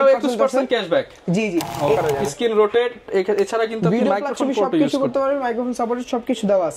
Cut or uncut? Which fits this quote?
cut